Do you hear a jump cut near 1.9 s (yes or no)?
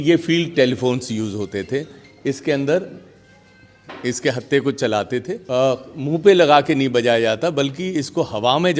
no